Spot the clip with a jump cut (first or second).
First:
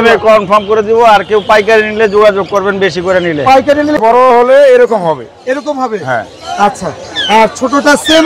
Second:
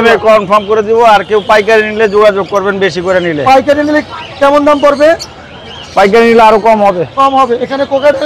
first